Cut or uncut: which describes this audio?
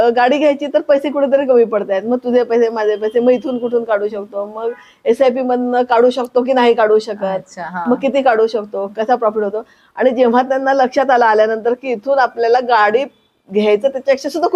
uncut